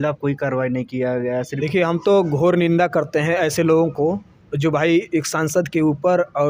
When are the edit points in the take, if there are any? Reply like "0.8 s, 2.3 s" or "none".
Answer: 1.5 s